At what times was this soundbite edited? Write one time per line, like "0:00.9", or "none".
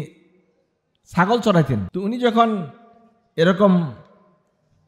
0:01.9